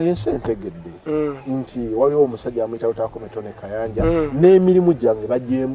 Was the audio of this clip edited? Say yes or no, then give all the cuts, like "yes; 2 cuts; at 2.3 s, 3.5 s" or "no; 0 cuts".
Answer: no; 0 cuts